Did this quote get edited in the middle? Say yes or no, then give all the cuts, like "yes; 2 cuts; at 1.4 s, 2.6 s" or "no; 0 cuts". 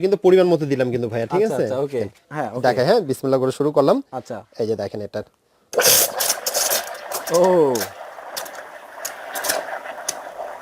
yes; 1 cut; at 2.3 s